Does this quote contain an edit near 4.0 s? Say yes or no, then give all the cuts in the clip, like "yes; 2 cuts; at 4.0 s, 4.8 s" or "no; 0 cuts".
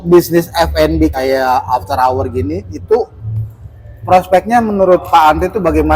no; 1 cut; at 1.2 s